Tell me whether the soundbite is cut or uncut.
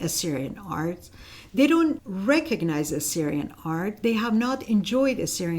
cut